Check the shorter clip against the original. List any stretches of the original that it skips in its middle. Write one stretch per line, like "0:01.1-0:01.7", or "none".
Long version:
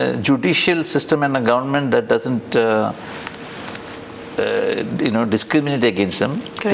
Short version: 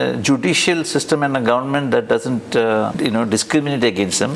0:02.9-0:04.9